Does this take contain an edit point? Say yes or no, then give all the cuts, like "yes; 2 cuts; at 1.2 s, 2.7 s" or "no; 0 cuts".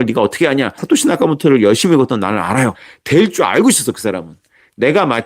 yes; 2 cuts; at 0.8 s, 2.9 s